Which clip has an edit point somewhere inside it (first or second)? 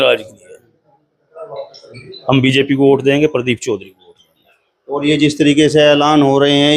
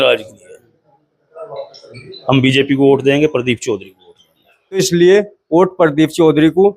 second